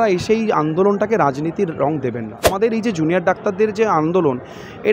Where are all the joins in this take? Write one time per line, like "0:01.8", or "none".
0:02.5